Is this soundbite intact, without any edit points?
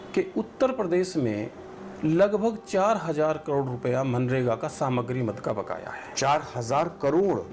yes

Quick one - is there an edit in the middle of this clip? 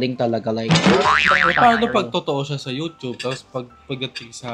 yes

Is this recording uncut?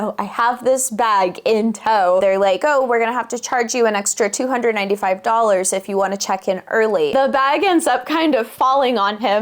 no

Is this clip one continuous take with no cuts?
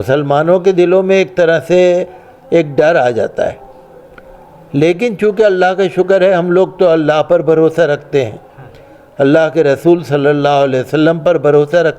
yes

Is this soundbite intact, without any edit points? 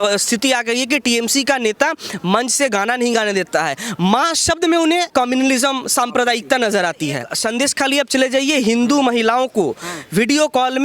no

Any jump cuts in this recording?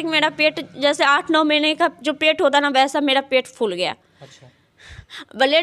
no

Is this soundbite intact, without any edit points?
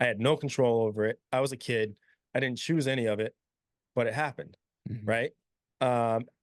yes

